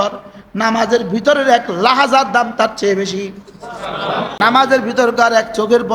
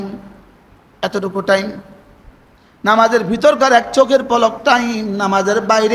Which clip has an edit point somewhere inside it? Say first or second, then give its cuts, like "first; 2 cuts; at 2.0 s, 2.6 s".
first; 1 cut; at 4.3 s